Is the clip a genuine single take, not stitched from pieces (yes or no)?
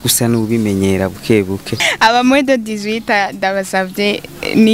no